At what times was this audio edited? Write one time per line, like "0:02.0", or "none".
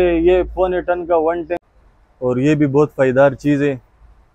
0:01.5